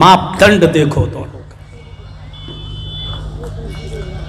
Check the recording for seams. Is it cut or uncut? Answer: uncut